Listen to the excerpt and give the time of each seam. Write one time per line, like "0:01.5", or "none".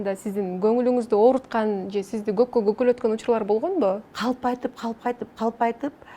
0:04.1